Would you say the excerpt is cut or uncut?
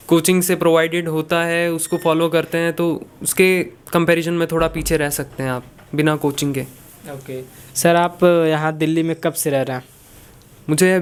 uncut